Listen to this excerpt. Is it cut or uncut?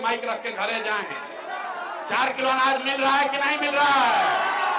uncut